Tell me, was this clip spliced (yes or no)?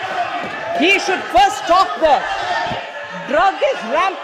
no